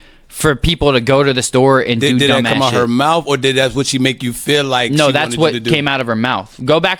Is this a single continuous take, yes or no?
yes